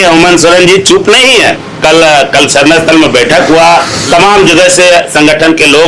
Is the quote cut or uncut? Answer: cut